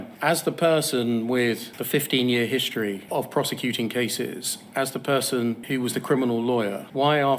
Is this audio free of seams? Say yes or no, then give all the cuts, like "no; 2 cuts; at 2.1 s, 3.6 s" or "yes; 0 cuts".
yes; 0 cuts